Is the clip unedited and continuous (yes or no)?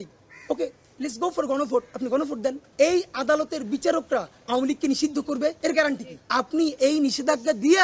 no